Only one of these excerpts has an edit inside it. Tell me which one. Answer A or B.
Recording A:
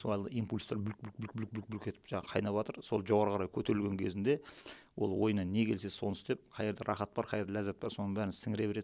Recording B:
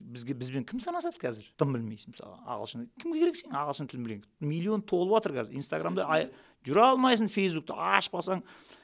B